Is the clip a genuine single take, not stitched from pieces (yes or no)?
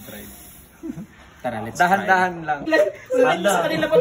no